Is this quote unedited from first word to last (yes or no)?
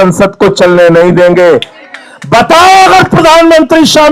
no